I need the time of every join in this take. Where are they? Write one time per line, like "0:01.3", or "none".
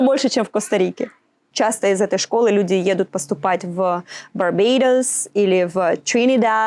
0:01.5